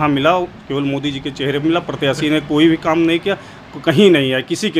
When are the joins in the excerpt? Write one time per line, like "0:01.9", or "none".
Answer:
none